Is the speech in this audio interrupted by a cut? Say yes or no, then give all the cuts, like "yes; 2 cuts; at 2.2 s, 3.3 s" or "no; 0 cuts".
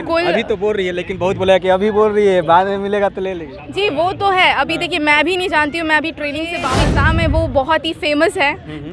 yes; 1 cut; at 6.7 s